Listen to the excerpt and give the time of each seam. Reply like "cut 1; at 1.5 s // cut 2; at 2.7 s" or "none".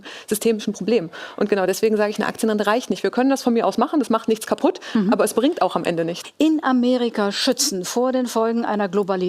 cut 1; at 6.2 s